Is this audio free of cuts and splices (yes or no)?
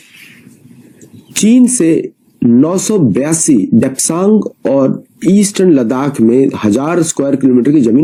yes